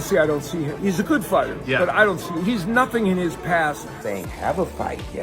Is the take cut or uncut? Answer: cut